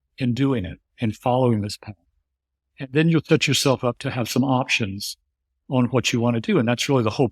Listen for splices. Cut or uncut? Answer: uncut